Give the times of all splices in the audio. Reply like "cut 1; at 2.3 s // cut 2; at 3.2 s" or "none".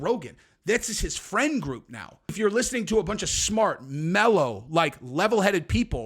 cut 1; at 2.3 s